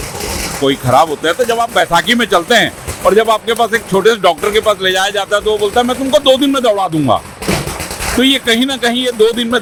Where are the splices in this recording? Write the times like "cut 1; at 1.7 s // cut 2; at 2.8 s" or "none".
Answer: none